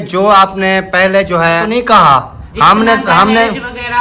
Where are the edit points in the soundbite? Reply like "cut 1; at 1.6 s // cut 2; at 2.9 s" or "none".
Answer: cut 1; at 1.7 s